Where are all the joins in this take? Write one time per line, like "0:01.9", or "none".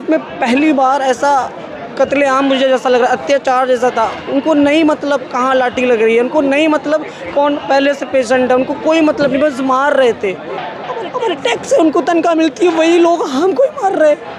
0:10.8